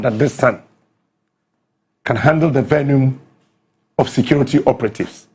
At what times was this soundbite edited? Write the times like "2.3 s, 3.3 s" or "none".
none